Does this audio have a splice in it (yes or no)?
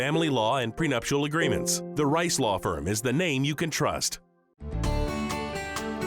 yes